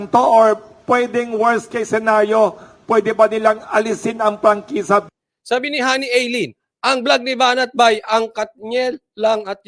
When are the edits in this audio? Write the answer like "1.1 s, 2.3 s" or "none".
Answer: none